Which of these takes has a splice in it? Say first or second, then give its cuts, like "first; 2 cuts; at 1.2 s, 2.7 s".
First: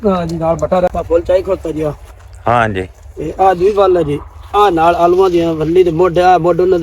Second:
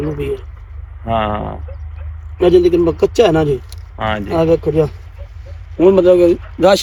first; 1 cut; at 0.9 s